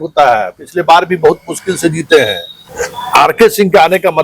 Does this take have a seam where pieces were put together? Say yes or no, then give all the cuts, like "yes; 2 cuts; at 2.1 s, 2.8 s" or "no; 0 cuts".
yes; 1 cut; at 2.5 s